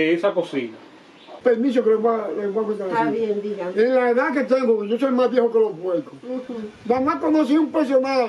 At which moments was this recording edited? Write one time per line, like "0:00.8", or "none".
0:01.4